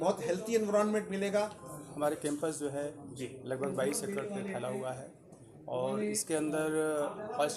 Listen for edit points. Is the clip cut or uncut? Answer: cut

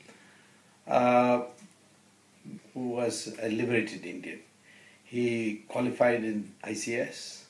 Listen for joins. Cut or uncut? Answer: uncut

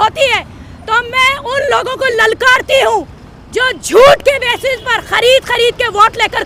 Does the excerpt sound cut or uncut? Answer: uncut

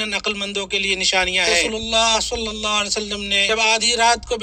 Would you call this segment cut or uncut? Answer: cut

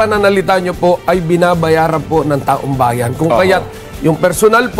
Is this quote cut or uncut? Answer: uncut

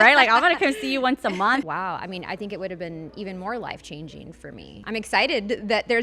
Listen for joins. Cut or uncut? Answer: cut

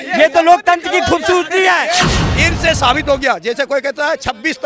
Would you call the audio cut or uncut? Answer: cut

